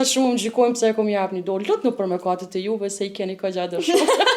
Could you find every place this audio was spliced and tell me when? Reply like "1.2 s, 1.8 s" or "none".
none

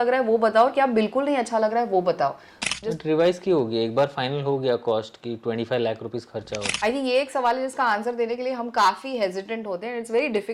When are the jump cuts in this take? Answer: 2.5 s, 6.7 s

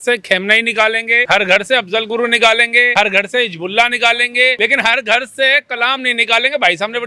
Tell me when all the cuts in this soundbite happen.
1.2 s, 2.9 s, 4.6 s

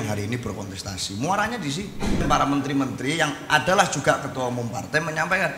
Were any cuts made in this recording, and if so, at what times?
2.2 s

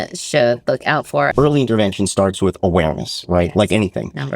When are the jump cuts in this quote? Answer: 1.3 s

